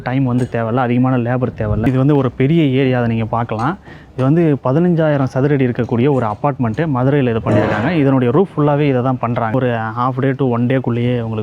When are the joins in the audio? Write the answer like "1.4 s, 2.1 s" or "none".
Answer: 1.9 s, 9.5 s